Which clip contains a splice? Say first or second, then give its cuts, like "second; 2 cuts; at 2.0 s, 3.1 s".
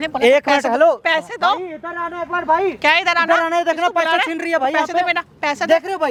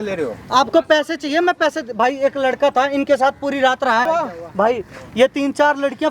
second; 1 cut; at 4.1 s